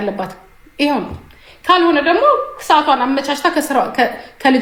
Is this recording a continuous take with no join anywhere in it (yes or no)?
yes